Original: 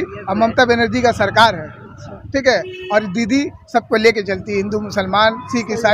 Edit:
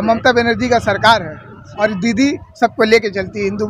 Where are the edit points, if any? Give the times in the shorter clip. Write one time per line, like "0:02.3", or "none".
0:01.6

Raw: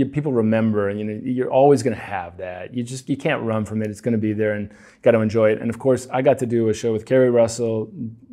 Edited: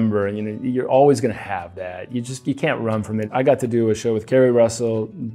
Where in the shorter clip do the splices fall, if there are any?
0:03.3

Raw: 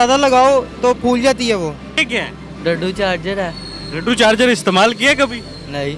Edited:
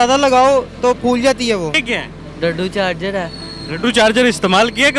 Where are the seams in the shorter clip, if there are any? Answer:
0:01.8

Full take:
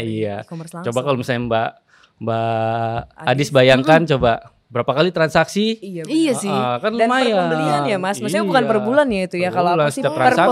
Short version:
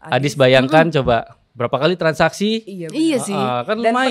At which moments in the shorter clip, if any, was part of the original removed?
none

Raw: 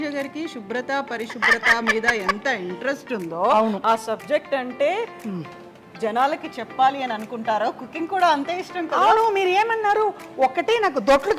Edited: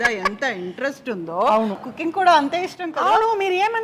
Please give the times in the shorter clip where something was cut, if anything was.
0:01.8

